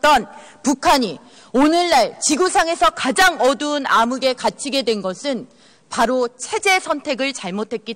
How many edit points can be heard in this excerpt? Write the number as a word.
one